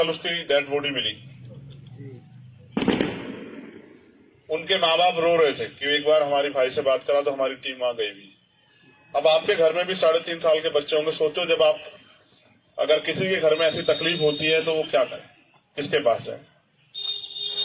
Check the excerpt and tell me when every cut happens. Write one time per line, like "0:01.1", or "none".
0:11.1